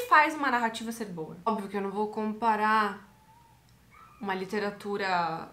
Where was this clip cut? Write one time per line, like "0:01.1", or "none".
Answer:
0:01.5